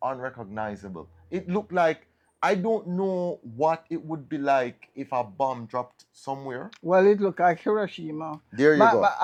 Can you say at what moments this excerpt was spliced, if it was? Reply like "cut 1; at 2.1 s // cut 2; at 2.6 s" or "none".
none